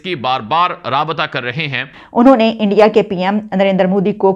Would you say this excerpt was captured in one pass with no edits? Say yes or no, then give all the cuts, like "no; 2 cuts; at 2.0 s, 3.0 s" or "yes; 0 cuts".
no; 1 cut; at 2.0 s